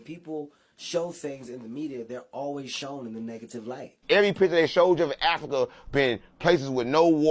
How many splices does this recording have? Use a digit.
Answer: 1